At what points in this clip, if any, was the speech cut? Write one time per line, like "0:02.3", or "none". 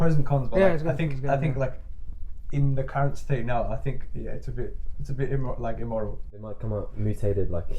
0:06.4

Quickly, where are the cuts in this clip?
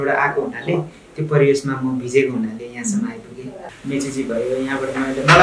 0:03.7

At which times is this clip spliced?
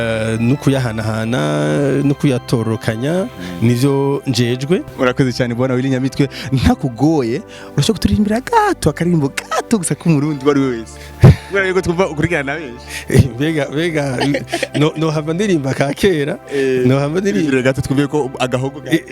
0:04.9

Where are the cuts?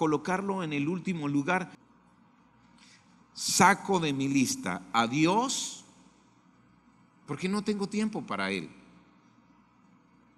0:01.8

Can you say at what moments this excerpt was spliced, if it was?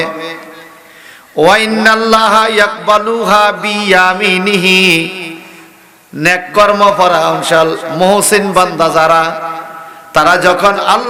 none

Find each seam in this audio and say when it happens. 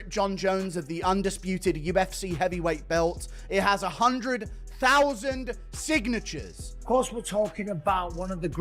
0:06.7

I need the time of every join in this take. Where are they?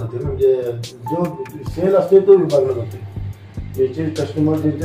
none

